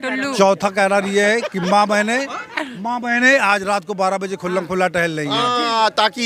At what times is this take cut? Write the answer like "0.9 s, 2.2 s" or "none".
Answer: none